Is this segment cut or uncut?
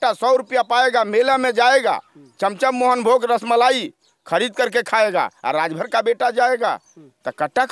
uncut